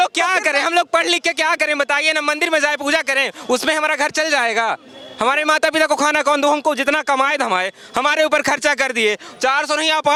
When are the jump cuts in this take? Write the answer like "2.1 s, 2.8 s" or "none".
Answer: none